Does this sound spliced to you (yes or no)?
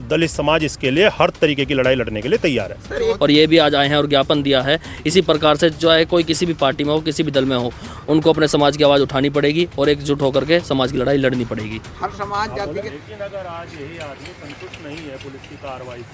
yes